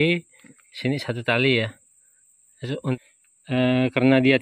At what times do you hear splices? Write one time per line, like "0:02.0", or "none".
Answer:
0:03.0